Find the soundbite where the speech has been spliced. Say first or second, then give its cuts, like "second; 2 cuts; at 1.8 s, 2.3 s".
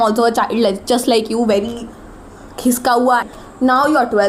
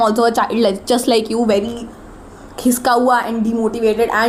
first; 1 cut; at 3.3 s